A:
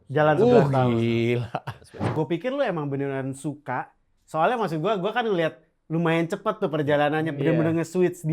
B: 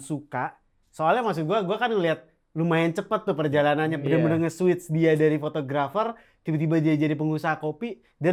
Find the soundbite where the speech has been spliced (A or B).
A